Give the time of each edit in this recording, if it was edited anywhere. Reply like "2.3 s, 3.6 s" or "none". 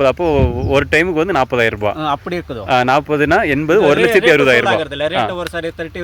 none

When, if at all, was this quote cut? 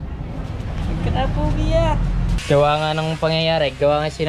2.4 s

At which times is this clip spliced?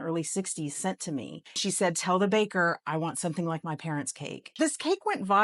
1.6 s, 4.4 s

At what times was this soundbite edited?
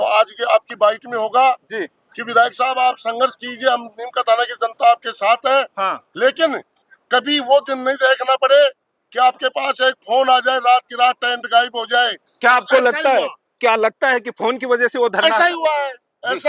none

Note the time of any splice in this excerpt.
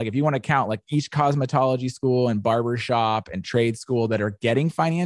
none

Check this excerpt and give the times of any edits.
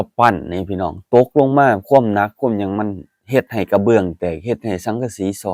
none

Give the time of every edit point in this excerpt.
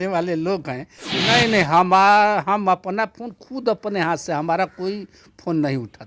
1.2 s

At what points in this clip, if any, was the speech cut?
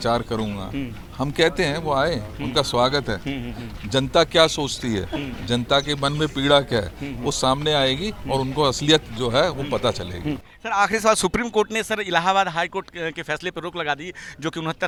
none

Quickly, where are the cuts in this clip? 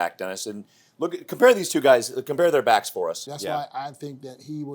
3.3 s

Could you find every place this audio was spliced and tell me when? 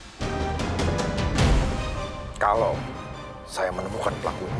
none

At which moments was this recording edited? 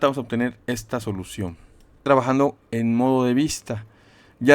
2.0 s

